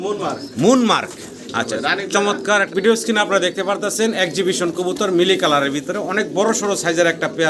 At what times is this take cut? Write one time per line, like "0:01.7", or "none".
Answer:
0:02.7